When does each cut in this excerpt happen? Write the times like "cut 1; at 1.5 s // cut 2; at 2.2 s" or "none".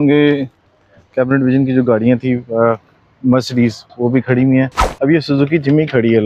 none